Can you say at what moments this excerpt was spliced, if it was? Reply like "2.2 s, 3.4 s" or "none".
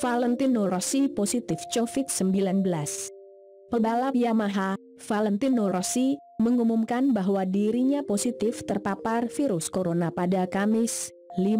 0.9 s